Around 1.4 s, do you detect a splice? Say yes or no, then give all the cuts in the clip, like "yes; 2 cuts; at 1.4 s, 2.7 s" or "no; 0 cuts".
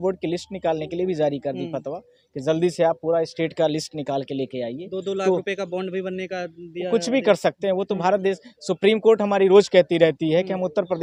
no; 0 cuts